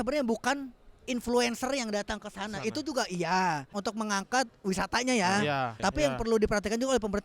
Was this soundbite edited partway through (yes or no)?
yes